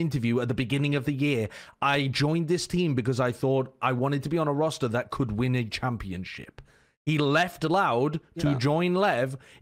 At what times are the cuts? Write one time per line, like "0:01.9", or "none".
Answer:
none